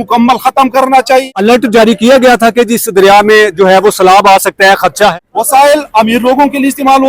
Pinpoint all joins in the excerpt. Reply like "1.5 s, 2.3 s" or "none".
1.3 s, 5.1 s

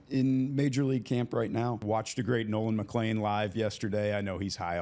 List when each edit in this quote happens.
1.8 s

